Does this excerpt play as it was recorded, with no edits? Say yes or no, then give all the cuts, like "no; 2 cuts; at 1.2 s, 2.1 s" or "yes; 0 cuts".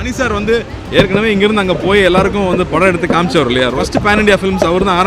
no; 1 cut; at 3.8 s